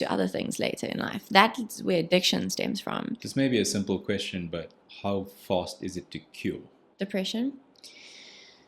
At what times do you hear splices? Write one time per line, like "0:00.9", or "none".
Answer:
0:03.2
0:04.8
0:06.8